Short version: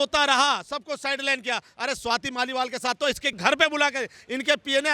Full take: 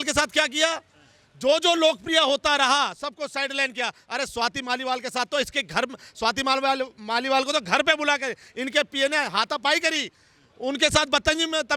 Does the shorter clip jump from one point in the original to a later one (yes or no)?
yes